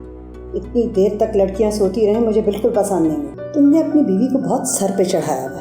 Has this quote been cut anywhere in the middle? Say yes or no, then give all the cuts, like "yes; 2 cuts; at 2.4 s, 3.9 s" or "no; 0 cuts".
yes; 1 cut; at 3.4 s